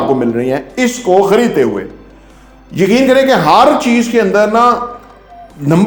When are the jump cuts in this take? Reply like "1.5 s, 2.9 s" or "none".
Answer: none